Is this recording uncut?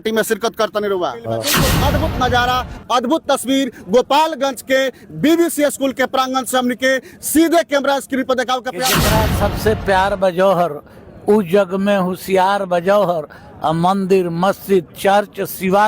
no; 2 cuts; at 1.6 s, 9.0 s

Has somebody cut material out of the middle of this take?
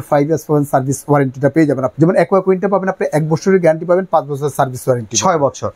yes; 1 cut; at 1.9 s

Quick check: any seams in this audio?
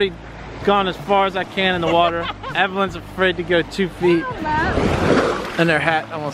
no; 0 cuts

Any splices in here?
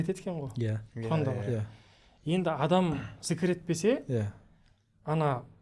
no; 0 cuts

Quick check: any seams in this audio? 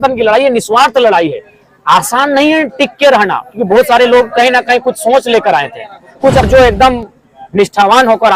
yes; 1 cut; at 6.5 s

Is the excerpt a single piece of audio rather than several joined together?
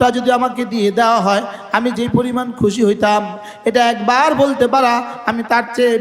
yes; 0 cuts

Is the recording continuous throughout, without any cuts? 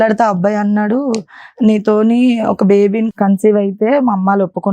no; 1 cut; at 3.1 s

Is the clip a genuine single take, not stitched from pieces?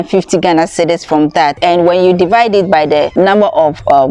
no; 2 cuts; at 1.6 s, 3.1 s

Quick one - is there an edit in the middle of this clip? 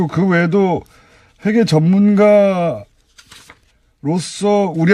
yes; 1 cut; at 3.9 s

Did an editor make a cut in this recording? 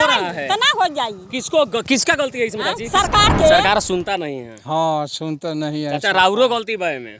yes; 1 cut; at 3.6 s

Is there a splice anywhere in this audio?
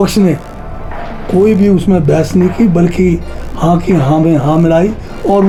no; 0 cuts

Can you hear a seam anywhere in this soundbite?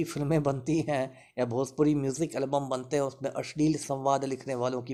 no; 0 cuts

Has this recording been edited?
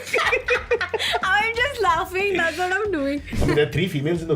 yes; 1 cut; at 3.3 s

